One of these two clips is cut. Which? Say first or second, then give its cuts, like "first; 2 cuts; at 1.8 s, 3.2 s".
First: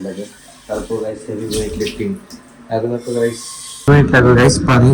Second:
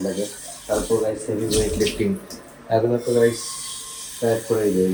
first; 1 cut; at 3.9 s